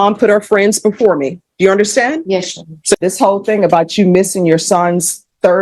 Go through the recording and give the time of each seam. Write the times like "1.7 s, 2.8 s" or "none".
2.9 s